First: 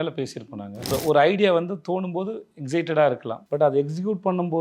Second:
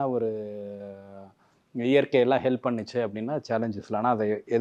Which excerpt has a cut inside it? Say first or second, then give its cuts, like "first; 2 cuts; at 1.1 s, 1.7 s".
first; 2 cuts; at 0.9 s, 3.3 s